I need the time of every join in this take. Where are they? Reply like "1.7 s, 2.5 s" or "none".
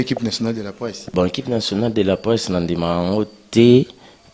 1.0 s

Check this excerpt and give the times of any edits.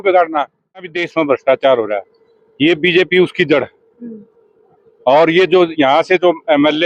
0.9 s

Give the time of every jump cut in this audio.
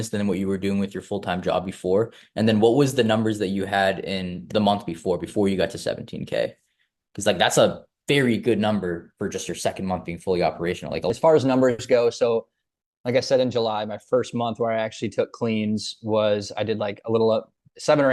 11.1 s

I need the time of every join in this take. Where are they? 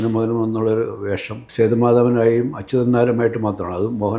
1.4 s

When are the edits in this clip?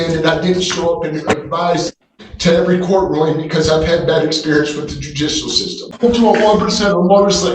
5.9 s

